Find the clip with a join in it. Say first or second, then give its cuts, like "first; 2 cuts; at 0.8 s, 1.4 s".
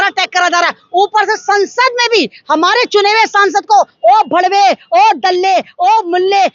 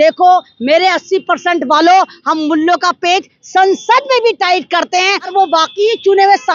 second; 1 cut; at 5.2 s